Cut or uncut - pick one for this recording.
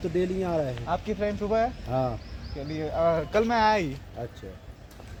uncut